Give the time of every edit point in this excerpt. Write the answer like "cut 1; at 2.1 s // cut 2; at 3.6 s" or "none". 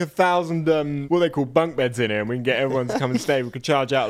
cut 1; at 1.0 s